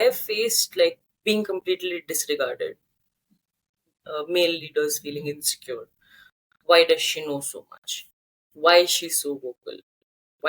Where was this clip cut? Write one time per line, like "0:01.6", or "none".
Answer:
0:01.1